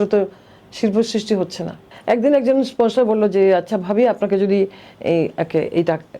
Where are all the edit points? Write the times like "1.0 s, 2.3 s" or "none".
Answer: 1.9 s